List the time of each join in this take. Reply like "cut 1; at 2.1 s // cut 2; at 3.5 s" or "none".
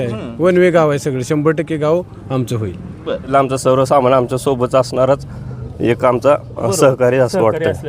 cut 1; at 3.3 s